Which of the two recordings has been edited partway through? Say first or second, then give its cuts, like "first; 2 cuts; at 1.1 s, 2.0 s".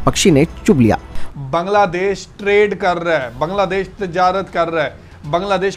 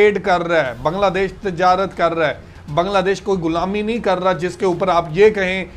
first; 1 cut; at 1.1 s